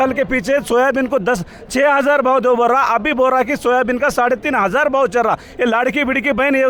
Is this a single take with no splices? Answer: yes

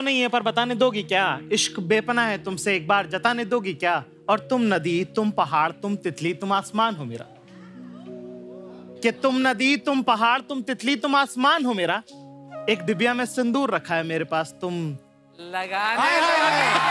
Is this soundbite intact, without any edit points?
yes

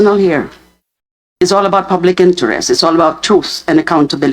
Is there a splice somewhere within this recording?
no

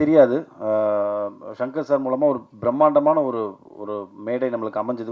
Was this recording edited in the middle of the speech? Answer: no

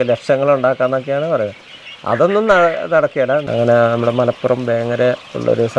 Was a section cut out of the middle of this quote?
yes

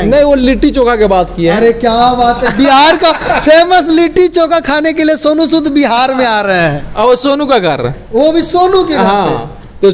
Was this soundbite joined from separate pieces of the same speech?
no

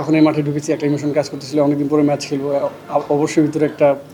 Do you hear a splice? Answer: no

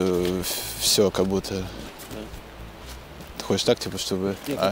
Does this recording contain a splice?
no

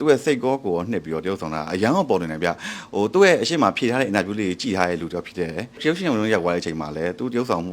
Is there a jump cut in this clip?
yes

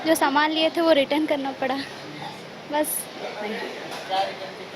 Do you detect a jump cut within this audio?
no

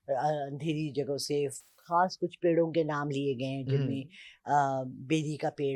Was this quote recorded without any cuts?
yes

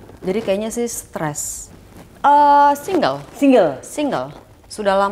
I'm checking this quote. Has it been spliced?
yes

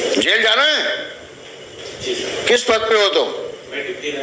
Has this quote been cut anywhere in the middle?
yes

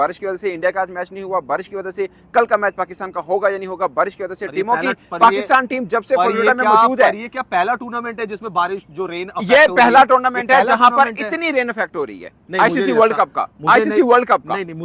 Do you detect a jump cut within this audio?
no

